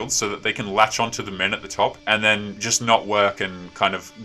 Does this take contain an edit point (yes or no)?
yes